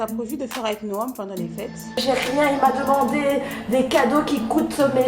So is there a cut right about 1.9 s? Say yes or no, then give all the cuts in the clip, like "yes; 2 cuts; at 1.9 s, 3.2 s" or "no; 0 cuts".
yes; 1 cut; at 1.9 s